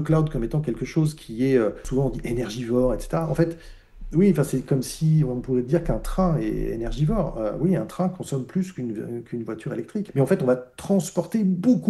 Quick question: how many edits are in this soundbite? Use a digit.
2